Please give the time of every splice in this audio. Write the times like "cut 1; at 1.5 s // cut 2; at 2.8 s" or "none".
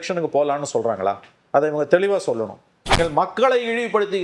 cut 1; at 2.9 s